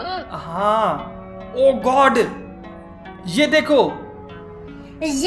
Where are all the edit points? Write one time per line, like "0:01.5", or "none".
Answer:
none